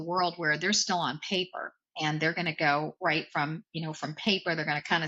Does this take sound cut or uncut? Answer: uncut